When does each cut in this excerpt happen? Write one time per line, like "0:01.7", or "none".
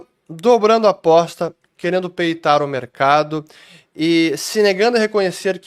none